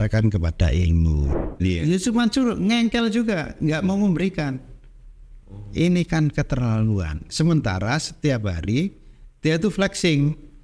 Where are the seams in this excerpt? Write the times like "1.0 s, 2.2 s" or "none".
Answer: 1.6 s